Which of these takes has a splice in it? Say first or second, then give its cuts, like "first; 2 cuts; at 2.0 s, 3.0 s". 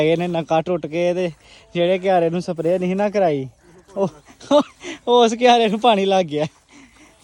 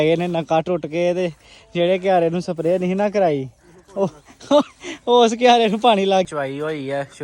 second; 1 cut; at 6.3 s